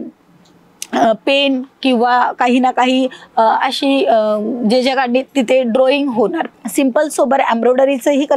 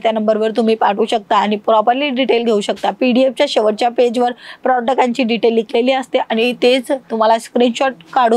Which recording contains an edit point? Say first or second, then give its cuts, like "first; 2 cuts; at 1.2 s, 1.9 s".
first; 1 cut; at 6.4 s